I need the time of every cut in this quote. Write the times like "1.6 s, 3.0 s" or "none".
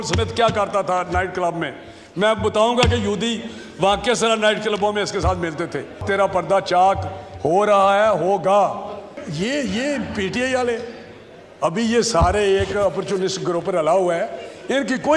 6.0 s, 9.2 s